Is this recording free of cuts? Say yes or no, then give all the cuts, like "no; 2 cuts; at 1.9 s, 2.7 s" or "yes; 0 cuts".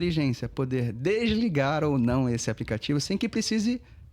yes; 0 cuts